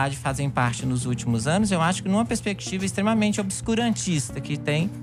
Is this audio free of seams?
yes; 0 cuts

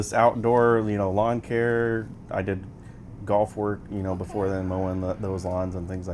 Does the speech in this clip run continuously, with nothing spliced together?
yes; 0 cuts

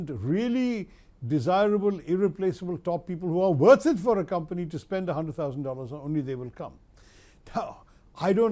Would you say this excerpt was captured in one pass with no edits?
yes; 0 cuts

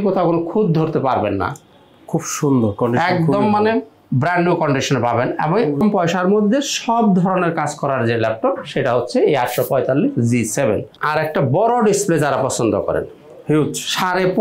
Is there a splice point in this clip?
yes; 2 cuts; at 5.8 s, 11.0 s

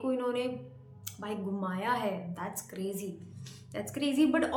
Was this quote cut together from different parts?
no; 0 cuts

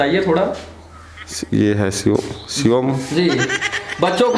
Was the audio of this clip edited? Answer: no; 0 cuts

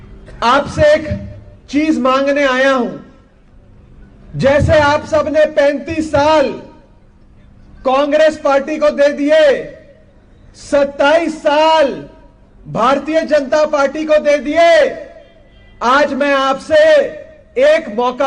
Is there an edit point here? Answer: no; 0 cuts

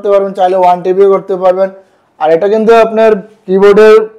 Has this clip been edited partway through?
no; 0 cuts

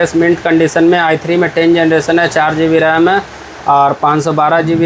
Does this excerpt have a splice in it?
no; 0 cuts

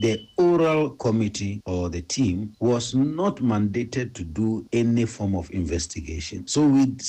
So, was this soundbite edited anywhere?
no; 0 cuts

